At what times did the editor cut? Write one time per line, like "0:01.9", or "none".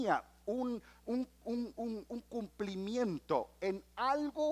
none